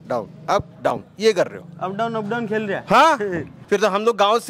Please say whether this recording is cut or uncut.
cut